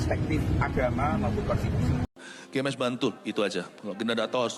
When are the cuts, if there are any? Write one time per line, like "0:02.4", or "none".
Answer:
0:02.1

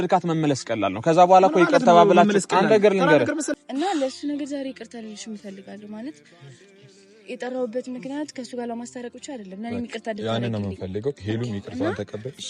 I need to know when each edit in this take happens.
0:03.5

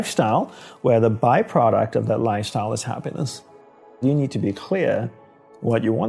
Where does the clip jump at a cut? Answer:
0:04.0

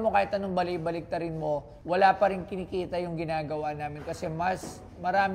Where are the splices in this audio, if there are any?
0:01.7

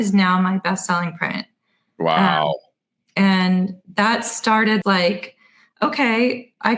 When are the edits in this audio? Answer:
0:04.8

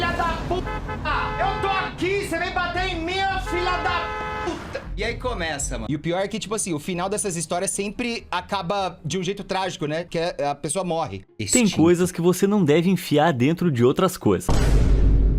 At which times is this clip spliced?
0:05.8
0:11.2

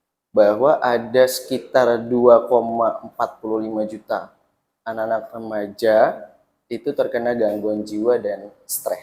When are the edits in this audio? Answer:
none

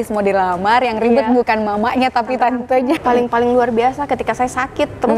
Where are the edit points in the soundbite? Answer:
0:03.0

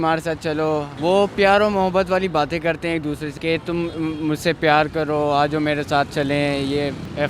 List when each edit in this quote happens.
0:00.9
0:03.3

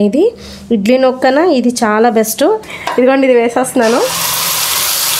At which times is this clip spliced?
0:02.6

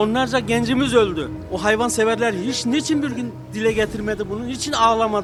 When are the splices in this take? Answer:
none

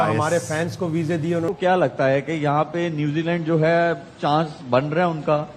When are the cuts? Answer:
0:01.5

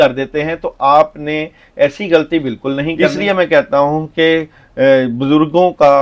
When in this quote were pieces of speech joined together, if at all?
0:03.1

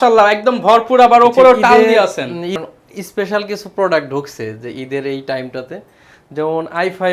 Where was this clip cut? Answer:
0:02.6

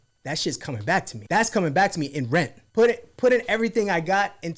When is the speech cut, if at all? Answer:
0:01.2
0:02.6

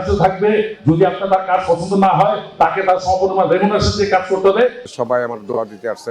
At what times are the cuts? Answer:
0:04.8

